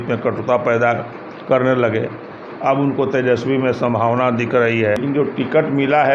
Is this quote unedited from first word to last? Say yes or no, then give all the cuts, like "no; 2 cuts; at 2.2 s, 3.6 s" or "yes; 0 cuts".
no; 1 cut; at 5.0 s